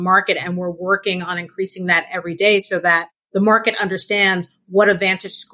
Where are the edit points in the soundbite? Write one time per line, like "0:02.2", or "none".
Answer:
0:03.1